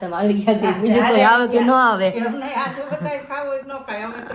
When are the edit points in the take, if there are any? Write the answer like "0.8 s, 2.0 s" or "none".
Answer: none